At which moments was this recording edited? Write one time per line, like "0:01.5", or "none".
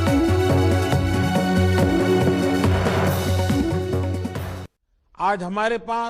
0:04.5